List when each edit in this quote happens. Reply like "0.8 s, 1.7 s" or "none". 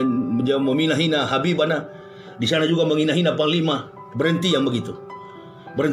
none